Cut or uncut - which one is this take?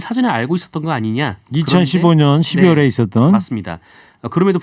uncut